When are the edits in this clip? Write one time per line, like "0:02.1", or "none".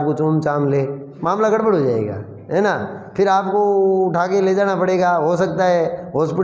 0:01.1